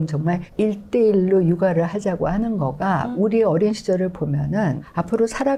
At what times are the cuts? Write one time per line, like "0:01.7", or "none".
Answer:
none